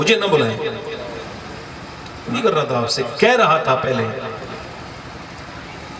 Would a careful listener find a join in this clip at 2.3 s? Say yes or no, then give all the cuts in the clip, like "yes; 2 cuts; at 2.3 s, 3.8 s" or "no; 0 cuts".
yes; 1 cut; at 2.3 s